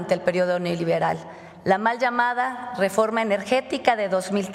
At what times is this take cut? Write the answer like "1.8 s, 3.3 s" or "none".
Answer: none